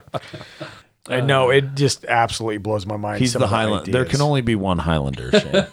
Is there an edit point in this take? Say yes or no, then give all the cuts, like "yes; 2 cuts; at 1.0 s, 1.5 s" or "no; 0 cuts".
no; 0 cuts